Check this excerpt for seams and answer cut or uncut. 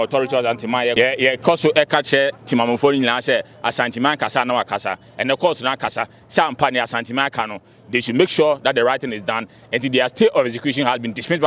cut